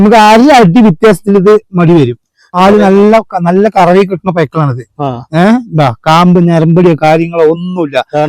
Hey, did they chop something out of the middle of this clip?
yes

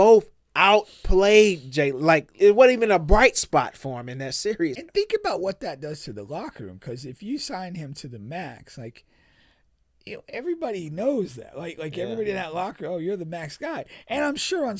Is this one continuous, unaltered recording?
no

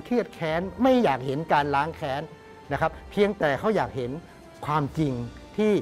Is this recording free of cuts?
yes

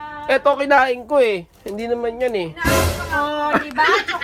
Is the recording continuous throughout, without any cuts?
yes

